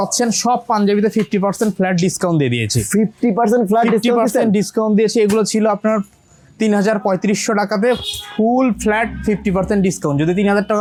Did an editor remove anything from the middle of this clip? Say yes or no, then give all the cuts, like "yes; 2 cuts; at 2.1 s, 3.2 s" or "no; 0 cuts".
no; 0 cuts